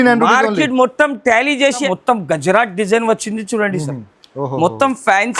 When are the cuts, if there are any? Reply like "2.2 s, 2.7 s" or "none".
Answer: 1.9 s